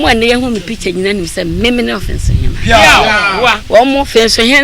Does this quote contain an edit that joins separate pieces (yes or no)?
yes